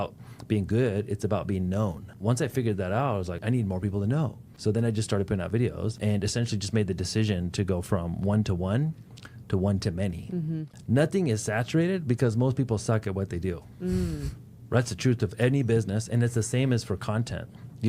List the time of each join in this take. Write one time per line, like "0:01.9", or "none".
0:02.1
0:03.4
0:04.4
0:06.0
0:10.7